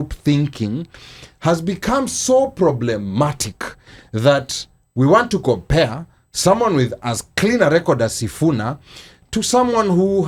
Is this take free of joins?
yes; 0 cuts

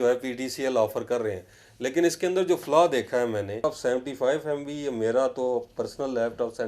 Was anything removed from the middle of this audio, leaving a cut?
yes; 1 cut; at 3.6 s

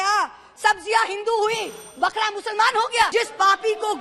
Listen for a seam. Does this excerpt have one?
yes; 1 cut; at 3.1 s

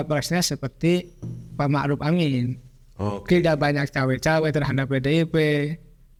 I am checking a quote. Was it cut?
no; 0 cuts

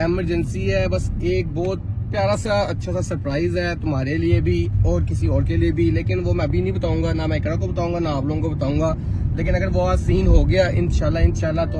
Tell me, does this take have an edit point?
no; 0 cuts

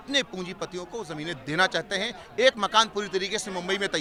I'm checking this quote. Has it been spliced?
no; 0 cuts

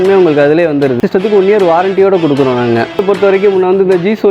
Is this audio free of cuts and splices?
no; 2 cuts; at 1.0 s, 3.0 s

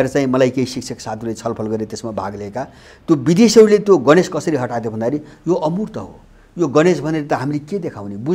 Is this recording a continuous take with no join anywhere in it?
yes; 0 cuts

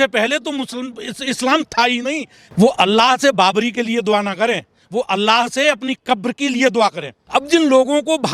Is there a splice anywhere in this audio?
yes; 2 cuts; at 2.4 s, 7.1 s

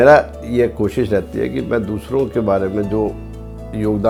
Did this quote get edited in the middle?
no; 0 cuts

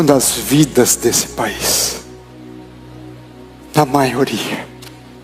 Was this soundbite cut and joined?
no; 0 cuts

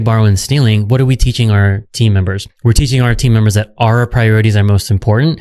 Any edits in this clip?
no; 0 cuts

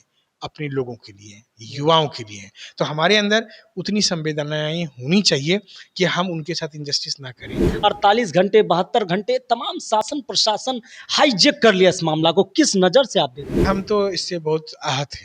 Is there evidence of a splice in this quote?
yes; 2 cuts; at 7.7 s, 13.6 s

